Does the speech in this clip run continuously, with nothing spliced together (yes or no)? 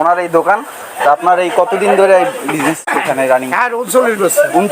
no